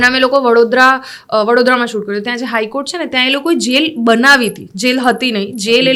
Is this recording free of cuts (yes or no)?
yes